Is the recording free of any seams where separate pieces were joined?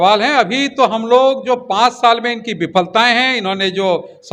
yes; 0 cuts

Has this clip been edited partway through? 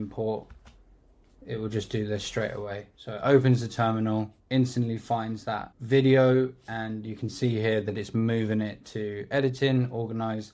yes; 1 cut; at 5.7 s

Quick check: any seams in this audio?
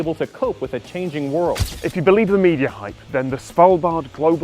yes; 1 cut; at 1.7 s

